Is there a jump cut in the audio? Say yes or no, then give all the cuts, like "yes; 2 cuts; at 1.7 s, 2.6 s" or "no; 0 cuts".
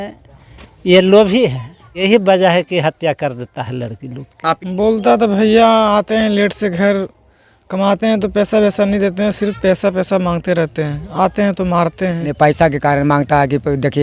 yes; 3 cuts; at 1.9 s, 4.6 s, 12.3 s